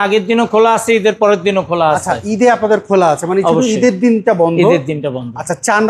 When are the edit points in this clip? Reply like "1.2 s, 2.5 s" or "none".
none